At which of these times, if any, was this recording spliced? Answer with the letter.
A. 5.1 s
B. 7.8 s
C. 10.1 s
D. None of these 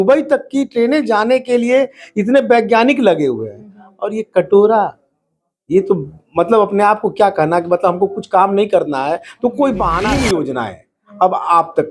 C